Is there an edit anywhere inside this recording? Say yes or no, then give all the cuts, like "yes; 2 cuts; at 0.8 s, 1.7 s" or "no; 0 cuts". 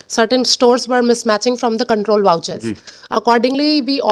no; 0 cuts